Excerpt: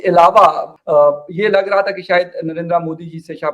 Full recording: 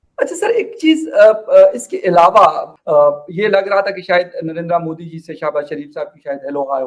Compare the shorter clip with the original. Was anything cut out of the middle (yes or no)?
no